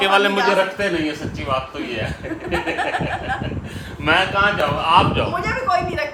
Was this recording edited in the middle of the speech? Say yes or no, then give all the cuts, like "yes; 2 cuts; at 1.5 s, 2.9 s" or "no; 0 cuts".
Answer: no; 0 cuts